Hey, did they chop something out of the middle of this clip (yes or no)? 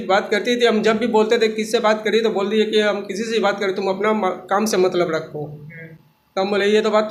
no